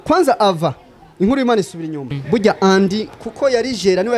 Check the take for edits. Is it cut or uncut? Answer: cut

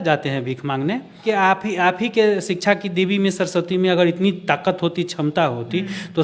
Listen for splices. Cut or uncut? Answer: uncut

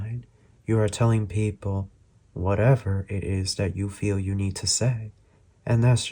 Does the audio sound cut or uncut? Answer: uncut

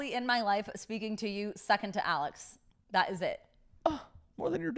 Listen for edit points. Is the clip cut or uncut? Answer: uncut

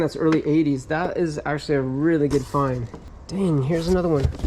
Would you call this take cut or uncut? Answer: uncut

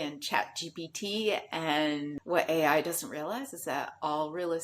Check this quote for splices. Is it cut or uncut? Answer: cut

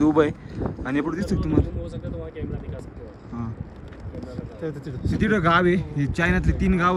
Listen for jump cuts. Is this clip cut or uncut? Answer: uncut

